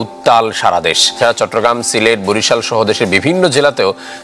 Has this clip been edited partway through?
yes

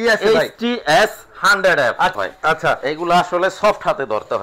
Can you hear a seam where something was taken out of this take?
yes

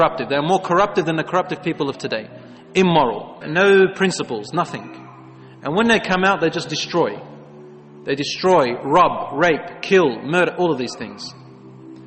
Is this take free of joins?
yes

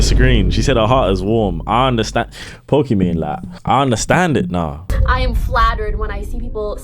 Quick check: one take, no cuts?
no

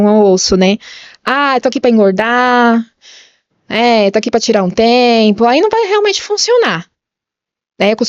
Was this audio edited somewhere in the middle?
no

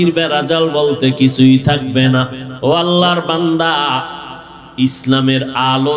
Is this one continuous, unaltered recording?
no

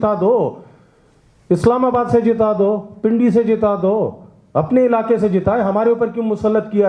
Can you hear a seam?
no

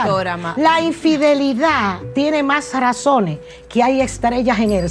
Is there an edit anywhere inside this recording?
no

